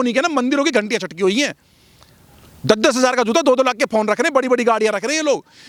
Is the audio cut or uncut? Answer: uncut